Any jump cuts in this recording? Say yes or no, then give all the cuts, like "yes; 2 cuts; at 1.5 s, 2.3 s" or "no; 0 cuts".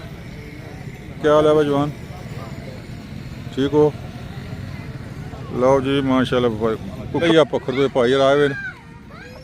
yes; 1 cut; at 7.2 s